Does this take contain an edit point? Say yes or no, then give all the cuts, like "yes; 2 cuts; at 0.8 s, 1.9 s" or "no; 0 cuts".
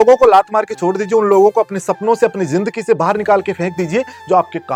no; 0 cuts